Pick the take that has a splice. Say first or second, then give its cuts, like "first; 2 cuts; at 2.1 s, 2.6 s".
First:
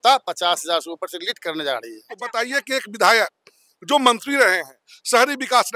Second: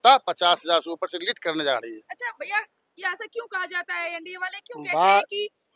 first; 1 cut; at 2.3 s